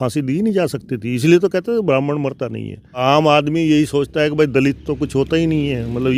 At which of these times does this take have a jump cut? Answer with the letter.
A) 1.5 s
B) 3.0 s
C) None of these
B